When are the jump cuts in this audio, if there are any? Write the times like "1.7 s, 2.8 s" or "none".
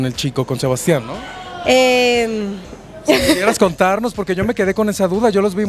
none